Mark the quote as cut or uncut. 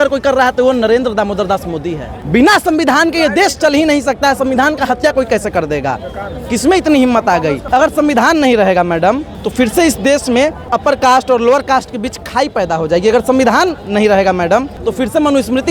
cut